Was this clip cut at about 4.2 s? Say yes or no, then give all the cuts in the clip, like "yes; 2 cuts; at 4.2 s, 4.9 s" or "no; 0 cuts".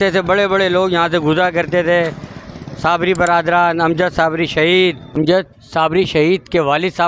no; 1 cut; at 5.6 s